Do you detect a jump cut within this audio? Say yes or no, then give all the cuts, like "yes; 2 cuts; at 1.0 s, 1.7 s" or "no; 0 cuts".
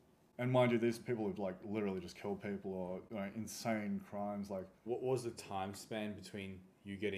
yes; 1 cut; at 4.8 s